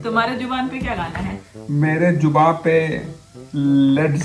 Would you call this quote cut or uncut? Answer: uncut